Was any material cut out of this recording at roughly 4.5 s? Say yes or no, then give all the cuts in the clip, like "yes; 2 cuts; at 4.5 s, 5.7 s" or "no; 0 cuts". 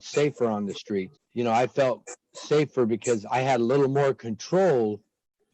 no; 1 cut; at 1.2 s